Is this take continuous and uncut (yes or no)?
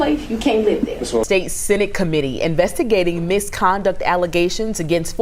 yes